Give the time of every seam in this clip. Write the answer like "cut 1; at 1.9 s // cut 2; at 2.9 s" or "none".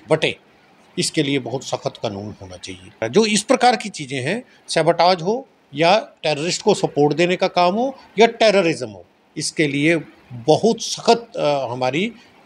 cut 1; at 3.0 s